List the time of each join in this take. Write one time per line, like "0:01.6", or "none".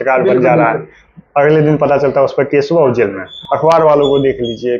0:03.3